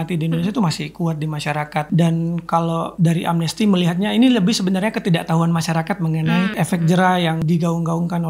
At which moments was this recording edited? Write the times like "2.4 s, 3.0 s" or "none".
1.9 s, 2.9 s, 6.5 s, 7.4 s